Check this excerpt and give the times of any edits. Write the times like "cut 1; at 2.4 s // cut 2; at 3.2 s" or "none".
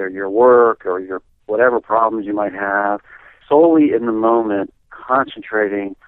cut 1; at 3.3 s